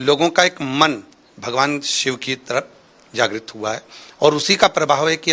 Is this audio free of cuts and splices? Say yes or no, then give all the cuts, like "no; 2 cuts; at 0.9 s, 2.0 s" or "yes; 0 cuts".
yes; 0 cuts